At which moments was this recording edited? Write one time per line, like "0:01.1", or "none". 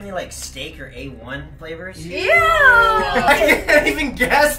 0:03.3